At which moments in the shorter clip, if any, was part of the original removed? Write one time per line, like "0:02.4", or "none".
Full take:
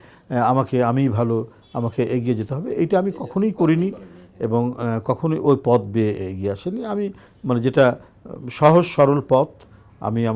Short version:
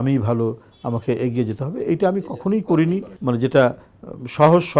0:03.1